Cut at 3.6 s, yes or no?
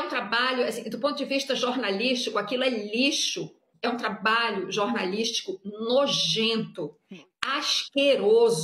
yes